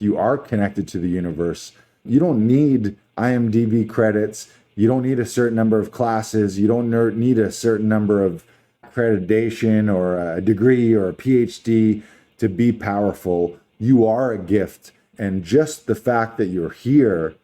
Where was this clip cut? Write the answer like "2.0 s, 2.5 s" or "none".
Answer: 2.0 s, 8.9 s, 15.1 s